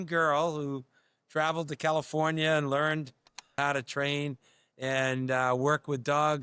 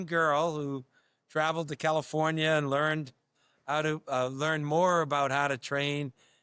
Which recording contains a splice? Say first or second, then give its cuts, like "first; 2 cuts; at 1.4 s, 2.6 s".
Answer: first; 1 cut; at 3.6 s